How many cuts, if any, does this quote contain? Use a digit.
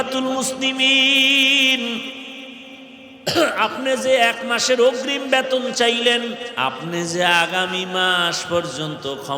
1